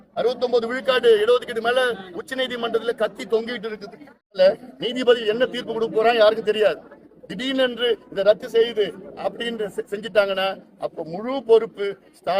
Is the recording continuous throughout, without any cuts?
no; 1 cut; at 4.4 s

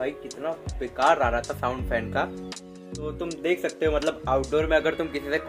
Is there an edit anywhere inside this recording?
no; 0 cuts

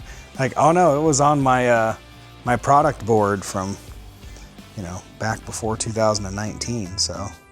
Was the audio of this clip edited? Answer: no; 0 cuts

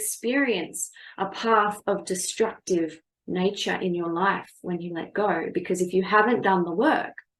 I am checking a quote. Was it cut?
no; 0 cuts

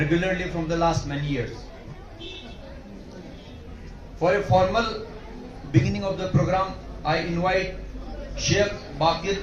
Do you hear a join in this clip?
no; 0 cuts

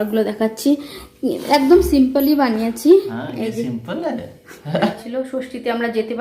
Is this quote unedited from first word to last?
no; 1 cut; at 5.0 s

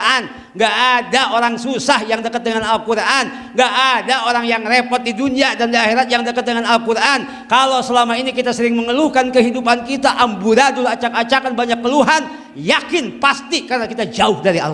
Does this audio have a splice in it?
no; 0 cuts

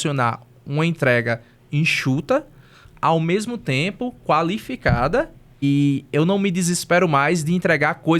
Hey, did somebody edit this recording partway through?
yes; 1 cut; at 5.6 s

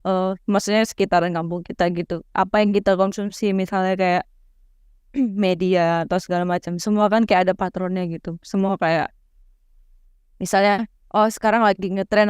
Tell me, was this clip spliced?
no; 0 cuts

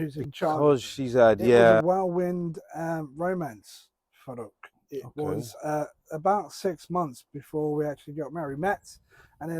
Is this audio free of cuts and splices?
no; 1 cut; at 1.8 s

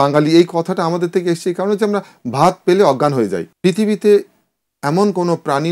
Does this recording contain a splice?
no; 0 cuts

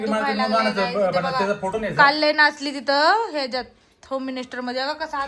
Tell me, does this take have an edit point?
no; 0 cuts

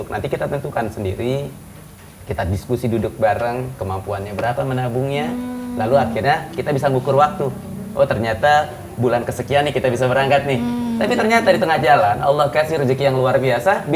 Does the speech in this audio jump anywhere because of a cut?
no; 0 cuts

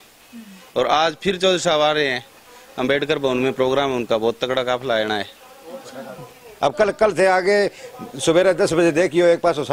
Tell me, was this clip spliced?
yes; 1 cut; at 6.3 s

